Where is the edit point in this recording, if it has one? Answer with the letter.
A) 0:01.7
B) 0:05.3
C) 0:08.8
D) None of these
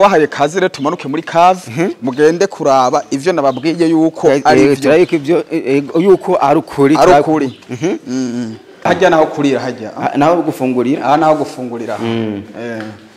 C